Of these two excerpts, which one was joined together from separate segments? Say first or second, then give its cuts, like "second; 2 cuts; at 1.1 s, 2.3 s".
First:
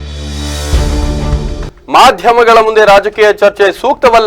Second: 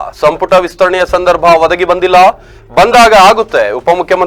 first; 1 cut; at 1.6 s